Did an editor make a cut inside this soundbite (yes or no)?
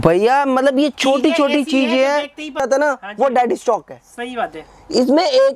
yes